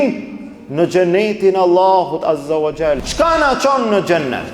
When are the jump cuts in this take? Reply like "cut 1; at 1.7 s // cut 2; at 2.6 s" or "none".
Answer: cut 1; at 3.1 s